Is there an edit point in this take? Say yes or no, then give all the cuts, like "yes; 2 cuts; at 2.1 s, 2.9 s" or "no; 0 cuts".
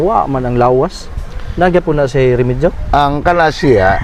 no; 0 cuts